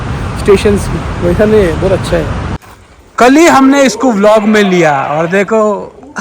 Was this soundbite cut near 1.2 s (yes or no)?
no